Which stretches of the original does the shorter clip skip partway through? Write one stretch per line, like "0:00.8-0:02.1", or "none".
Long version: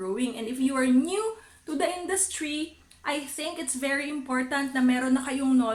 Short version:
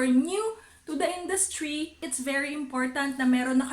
0:02.8-0:03.6